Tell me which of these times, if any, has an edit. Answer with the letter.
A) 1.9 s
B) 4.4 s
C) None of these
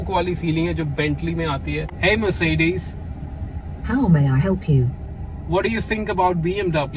A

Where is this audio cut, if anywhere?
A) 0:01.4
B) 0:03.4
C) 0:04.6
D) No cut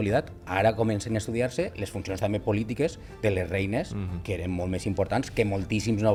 D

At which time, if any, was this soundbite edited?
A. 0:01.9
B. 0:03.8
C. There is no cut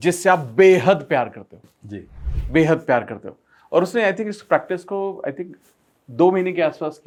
C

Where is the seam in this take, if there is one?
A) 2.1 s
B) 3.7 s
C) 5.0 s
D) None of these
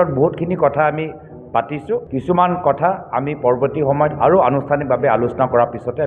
A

